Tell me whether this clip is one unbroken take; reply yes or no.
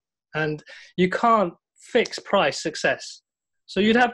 yes